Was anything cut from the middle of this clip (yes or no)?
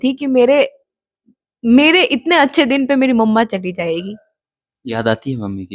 no